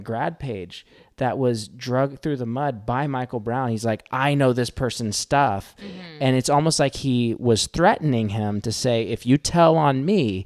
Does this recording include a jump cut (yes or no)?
no